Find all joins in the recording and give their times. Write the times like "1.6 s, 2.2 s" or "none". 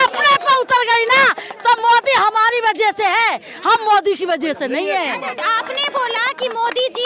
none